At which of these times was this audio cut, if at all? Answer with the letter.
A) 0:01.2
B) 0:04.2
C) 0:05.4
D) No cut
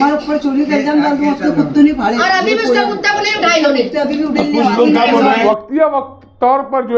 C